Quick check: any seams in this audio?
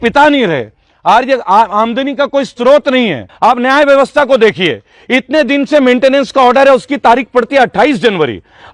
yes; 1 cut; at 3.2 s

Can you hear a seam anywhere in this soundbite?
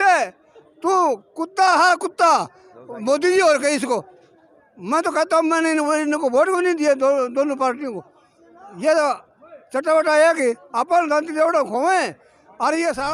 no; 0 cuts

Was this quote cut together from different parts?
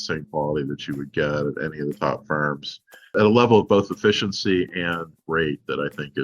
yes; 1 cut; at 3.1 s

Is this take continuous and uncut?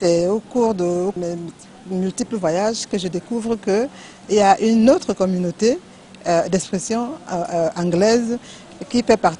no; 1 cut; at 1.2 s

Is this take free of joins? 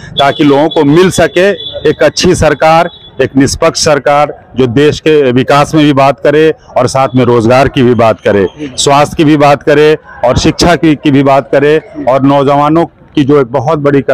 yes; 0 cuts

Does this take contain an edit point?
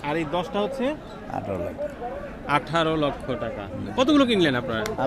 yes; 1 cut; at 3.9 s

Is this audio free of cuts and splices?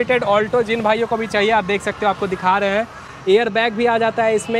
yes; 0 cuts

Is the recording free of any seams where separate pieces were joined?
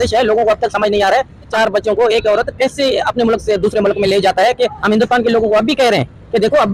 no; 2 cuts; at 1.5 s, 4.8 s

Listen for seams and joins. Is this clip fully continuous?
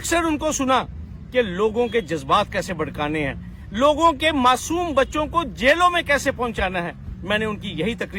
yes; 0 cuts

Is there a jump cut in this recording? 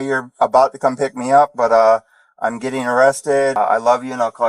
yes; 1 cut; at 3.6 s

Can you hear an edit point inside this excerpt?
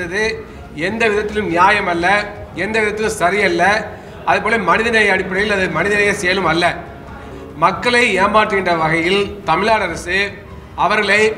yes; 1 cut; at 7.3 s

